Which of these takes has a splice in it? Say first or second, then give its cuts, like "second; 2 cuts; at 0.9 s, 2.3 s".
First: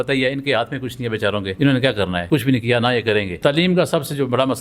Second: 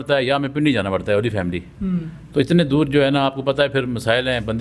first; 3 cuts; at 1.5 s, 2.2 s, 3.3 s